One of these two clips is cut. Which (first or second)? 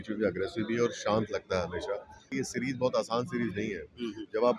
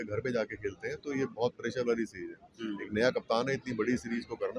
first